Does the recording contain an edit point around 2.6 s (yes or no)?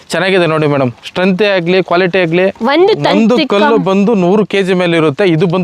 yes